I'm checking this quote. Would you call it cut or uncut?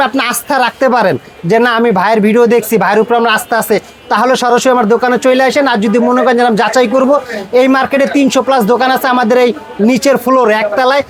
uncut